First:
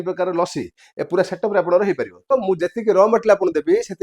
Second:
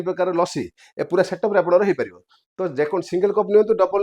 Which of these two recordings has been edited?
first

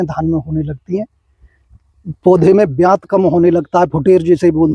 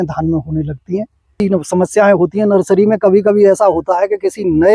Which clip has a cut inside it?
second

